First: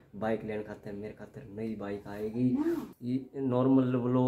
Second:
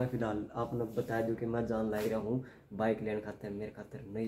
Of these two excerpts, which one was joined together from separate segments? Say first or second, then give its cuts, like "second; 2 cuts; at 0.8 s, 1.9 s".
first; 1 cut; at 2.9 s